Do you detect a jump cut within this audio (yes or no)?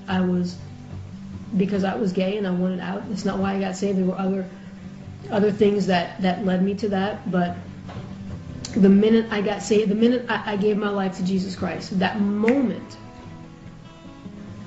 yes